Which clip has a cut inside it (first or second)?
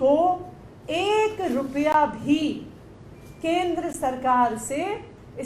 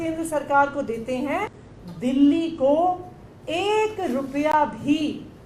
second